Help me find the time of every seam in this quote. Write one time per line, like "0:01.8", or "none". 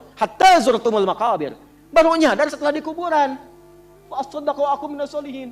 none